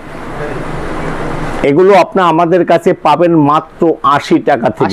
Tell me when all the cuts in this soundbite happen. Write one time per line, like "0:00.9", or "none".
none